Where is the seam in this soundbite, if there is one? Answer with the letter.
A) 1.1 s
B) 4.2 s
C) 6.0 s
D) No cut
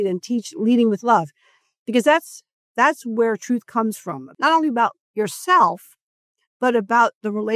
B